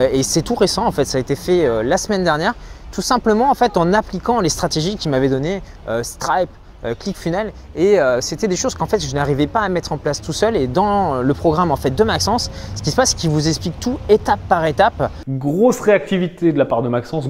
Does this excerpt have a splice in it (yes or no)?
yes